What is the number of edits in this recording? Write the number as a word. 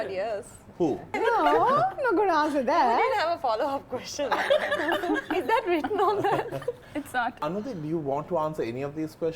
two